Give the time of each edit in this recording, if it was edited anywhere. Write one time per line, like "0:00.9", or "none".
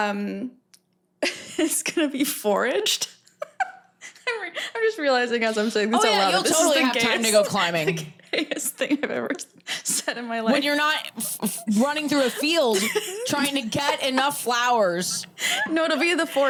none